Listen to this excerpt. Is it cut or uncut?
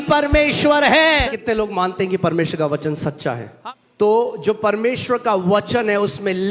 cut